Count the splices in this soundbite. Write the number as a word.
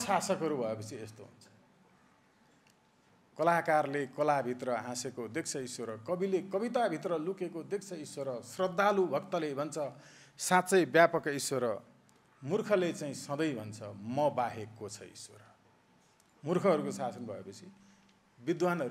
zero